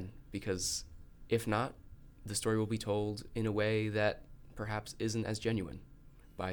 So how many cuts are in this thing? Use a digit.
0